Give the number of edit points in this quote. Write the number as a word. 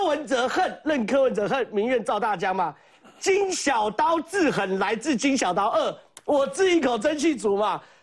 zero